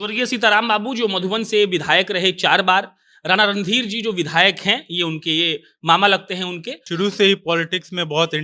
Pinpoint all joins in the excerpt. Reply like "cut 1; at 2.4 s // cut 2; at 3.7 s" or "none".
cut 1; at 6.8 s